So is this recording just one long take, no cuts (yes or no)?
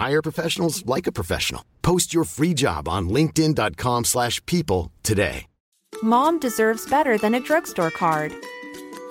no